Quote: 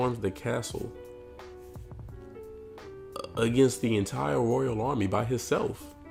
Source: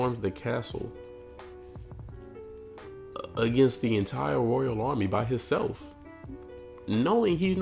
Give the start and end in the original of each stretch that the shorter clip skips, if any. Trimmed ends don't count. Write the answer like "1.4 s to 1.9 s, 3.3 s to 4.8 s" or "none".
none